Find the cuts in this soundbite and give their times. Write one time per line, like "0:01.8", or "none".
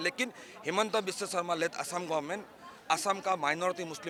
none